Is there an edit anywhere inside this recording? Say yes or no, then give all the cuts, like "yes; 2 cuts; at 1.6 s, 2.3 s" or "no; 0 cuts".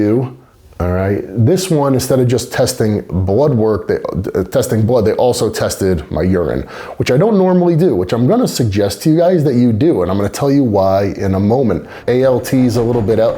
yes; 1 cut; at 11.9 s